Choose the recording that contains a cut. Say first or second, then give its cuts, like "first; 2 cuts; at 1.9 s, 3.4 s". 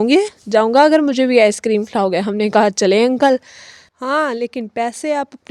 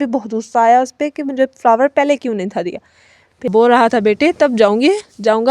second; 1 cut; at 3.4 s